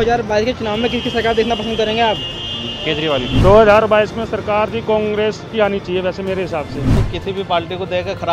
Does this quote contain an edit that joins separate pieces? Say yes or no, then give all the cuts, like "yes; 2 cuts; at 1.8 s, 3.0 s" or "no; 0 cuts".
yes; 2 cuts; at 3.3 s, 7.1 s